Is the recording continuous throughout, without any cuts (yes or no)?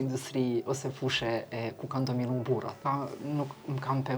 no